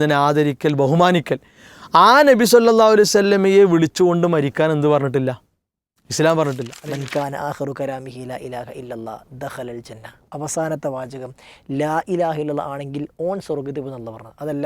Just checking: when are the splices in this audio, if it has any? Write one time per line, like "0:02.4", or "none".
0:06.7